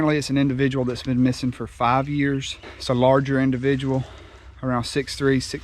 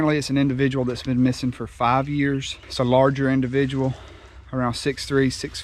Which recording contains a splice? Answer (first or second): second